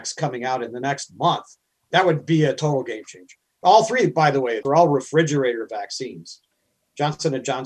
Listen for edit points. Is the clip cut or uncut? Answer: cut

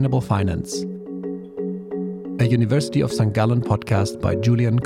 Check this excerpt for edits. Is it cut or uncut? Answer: uncut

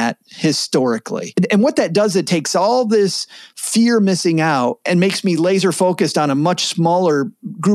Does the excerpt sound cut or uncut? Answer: cut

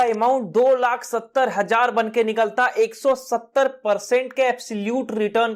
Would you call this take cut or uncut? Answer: uncut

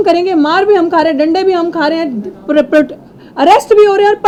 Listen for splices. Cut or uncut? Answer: uncut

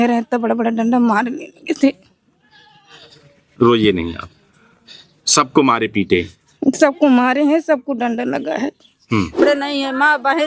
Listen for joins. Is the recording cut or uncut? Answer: cut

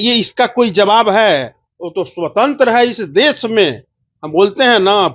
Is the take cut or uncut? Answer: uncut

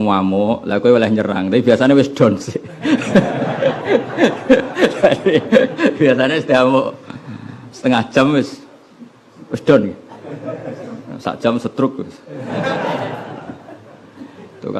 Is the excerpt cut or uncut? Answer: uncut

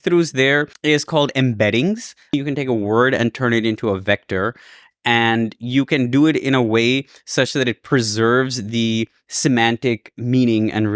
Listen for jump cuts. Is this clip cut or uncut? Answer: cut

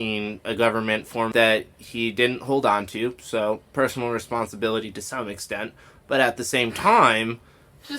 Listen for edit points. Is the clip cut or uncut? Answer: cut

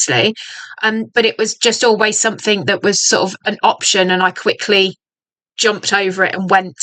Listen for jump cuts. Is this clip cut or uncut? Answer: uncut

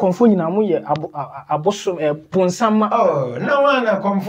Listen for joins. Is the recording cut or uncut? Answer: uncut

